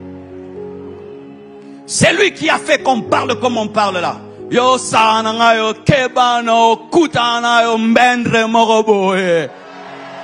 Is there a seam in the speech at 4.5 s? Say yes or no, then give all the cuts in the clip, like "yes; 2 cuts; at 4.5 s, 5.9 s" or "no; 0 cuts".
no; 0 cuts